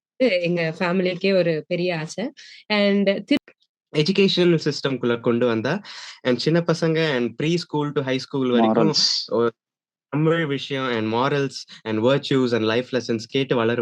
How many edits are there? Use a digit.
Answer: 1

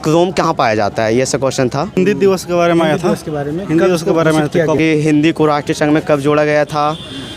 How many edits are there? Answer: 2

